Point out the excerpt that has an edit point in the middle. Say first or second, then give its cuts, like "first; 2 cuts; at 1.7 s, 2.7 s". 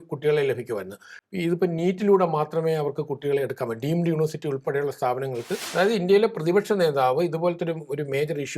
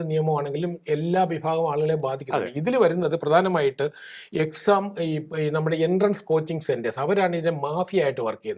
first; 1 cut; at 5.6 s